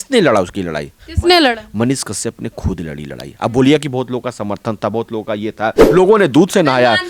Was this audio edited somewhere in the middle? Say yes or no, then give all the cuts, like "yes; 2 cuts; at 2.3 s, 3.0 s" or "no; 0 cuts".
yes; 1 cut; at 5.8 s